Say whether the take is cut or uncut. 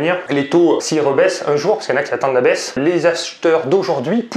uncut